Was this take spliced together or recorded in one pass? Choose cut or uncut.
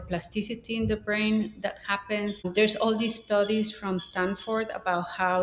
cut